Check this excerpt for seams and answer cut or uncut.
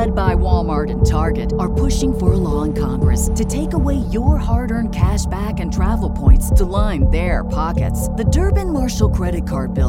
uncut